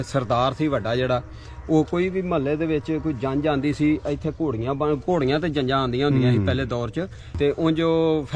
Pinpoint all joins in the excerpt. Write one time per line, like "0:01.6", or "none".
0:07.3

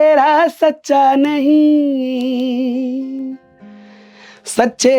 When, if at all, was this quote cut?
none

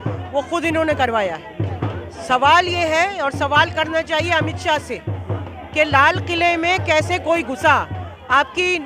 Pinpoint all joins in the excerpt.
none

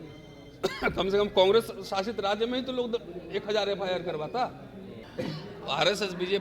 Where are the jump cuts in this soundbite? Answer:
0:05.0

